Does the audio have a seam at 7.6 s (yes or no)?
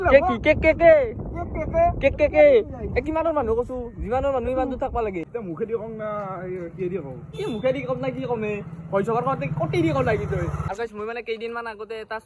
no